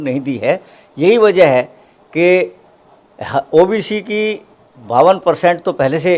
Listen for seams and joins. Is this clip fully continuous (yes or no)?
yes